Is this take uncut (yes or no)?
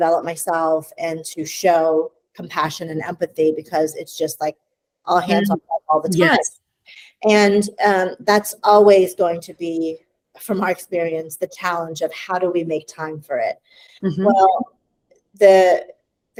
yes